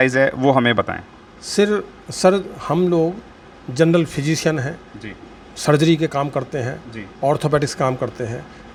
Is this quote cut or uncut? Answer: uncut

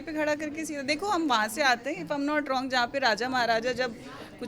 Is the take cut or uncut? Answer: uncut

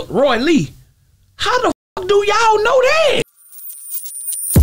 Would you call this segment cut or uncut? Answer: cut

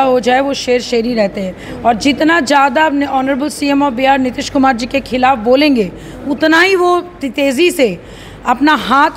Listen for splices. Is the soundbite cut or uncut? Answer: uncut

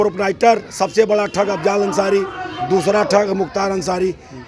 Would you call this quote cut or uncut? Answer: uncut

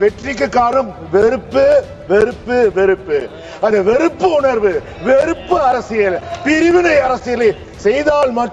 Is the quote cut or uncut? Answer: uncut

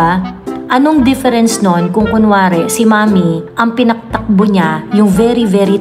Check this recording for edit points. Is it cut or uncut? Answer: uncut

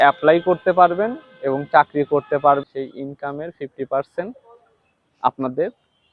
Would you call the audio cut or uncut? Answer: cut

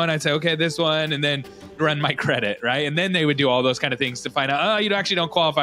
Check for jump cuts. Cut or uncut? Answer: cut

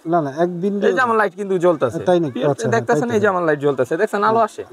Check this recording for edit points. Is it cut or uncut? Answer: uncut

